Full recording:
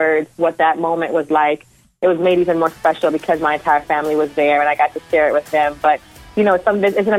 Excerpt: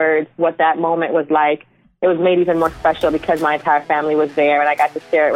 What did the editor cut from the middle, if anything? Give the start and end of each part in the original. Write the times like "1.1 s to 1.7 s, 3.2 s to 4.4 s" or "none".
none